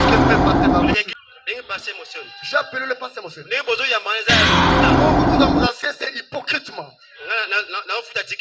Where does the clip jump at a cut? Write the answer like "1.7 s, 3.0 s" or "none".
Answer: 0.9 s, 4.5 s, 5.7 s